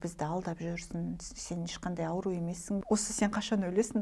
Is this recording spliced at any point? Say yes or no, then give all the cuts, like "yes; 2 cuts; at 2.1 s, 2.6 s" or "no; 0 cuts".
yes; 1 cut; at 2.8 s